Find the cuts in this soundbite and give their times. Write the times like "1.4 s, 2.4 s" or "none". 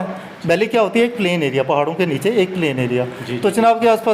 none